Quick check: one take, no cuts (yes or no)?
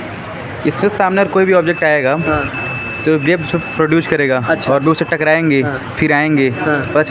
yes